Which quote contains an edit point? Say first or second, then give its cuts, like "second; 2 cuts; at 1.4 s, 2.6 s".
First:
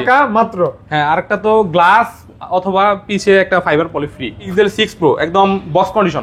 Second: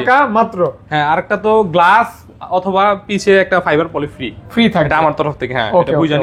first; 1 cut; at 4.4 s